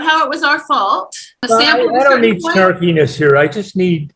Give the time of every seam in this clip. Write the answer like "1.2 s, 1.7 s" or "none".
1.4 s